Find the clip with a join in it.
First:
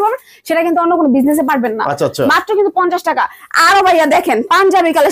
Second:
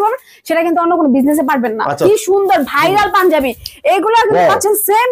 second; 1 cut; at 2.0 s

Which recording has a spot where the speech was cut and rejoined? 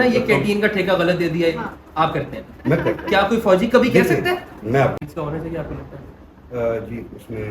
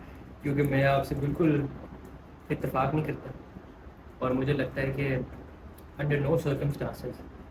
first; 1 cut; at 5.0 s

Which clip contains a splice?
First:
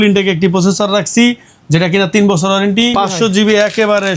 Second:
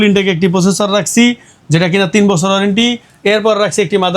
first; 1 cut; at 3.0 s

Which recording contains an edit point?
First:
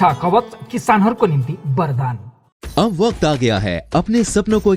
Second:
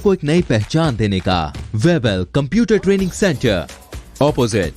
second; 1 cut; at 1.6 s

